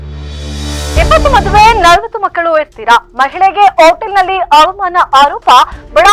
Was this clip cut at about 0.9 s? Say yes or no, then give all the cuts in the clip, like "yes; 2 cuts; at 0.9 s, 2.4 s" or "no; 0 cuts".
yes; 1 cut; at 0.9 s